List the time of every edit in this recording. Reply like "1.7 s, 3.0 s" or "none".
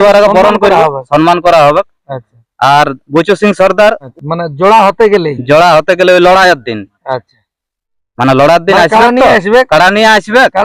4.1 s